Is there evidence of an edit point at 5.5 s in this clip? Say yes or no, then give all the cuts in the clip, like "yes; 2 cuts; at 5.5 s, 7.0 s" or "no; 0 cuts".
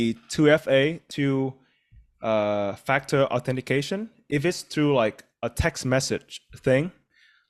no; 2 cuts; at 1.0 s, 4.1 s